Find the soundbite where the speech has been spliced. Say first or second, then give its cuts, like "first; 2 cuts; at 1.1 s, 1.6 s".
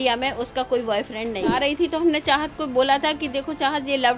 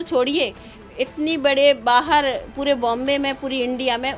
first; 1 cut; at 1.5 s